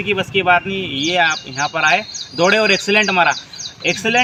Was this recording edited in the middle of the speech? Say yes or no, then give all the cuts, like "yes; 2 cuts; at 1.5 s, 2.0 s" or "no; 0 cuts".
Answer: no; 0 cuts